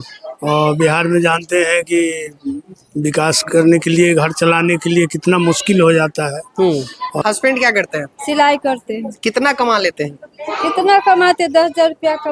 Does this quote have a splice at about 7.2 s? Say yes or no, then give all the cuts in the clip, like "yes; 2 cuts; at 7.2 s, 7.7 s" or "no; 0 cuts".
yes; 1 cut; at 7.2 s